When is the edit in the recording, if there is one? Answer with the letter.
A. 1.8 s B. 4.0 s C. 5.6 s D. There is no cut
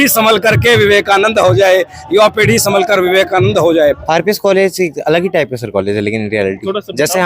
B